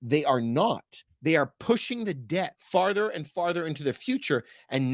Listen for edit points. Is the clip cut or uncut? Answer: cut